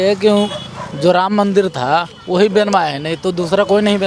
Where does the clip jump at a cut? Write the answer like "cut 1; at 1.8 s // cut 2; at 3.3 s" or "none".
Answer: none